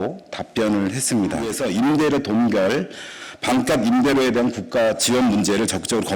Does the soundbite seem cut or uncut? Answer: cut